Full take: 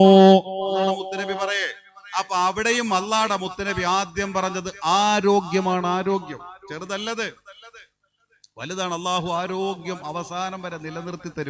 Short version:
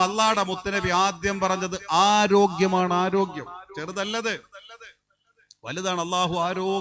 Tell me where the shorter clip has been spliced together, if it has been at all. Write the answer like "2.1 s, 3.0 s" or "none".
none